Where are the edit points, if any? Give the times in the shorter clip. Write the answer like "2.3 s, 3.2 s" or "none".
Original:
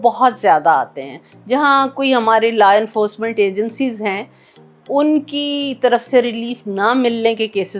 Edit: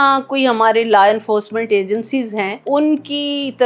2.6 s

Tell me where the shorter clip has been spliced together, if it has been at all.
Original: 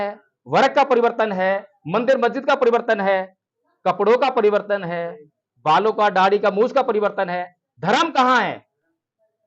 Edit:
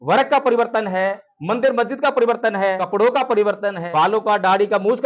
2.8 s, 3.8 s

